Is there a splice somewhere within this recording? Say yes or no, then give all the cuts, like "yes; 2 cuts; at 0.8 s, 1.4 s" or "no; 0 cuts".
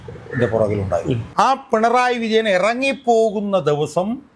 yes; 1 cut; at 1.3 s